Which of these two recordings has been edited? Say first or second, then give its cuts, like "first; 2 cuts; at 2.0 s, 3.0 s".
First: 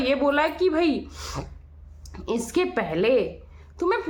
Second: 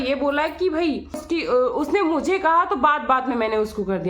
second; 1 cut; at 1.2 s